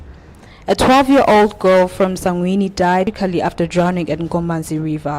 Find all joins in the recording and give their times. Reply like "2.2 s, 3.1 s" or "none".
3.1 s